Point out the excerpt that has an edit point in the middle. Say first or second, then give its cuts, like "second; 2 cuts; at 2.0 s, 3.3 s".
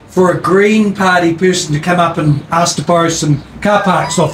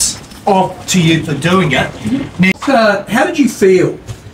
second; 1 cut; at 2.5 s